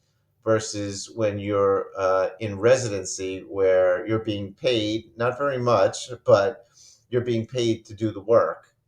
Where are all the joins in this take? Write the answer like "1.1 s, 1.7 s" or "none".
none